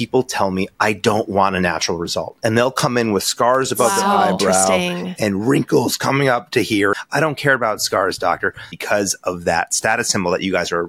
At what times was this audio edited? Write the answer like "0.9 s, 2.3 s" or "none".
7.0 s, 8.8 s